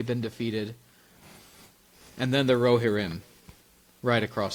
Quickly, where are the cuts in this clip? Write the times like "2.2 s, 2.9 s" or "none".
none